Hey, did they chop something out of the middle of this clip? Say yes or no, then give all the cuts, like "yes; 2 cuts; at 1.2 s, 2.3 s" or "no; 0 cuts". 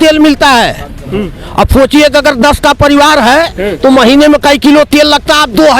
no; 0 cuts